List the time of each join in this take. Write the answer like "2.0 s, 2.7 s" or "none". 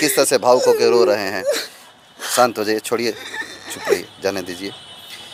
none